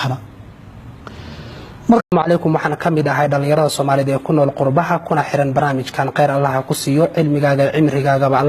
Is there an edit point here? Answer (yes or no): no